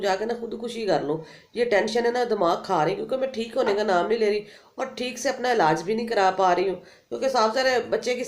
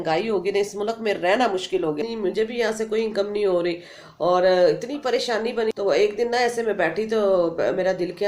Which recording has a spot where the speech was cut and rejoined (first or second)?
second